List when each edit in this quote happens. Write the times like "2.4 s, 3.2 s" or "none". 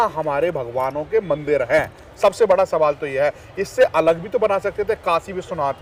none